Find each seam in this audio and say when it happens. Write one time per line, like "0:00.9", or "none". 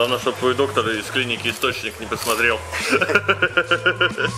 none